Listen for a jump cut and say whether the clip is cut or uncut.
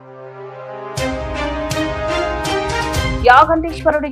cut